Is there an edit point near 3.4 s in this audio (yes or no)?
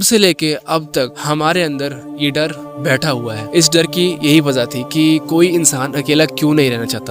yes